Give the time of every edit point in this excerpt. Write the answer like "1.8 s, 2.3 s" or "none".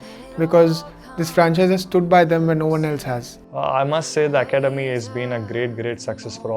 none